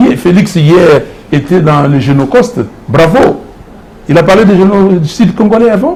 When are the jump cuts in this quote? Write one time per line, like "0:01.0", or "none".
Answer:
none